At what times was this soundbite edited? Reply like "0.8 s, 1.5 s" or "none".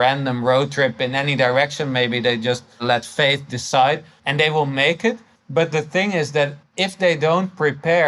2.8 s, 4.1 s, 5.3 s, 6.7 s